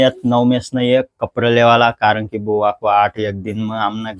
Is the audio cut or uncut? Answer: uncut